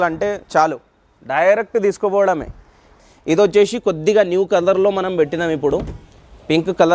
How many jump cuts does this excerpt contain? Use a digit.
1